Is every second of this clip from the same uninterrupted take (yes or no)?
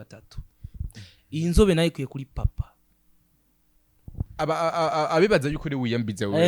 no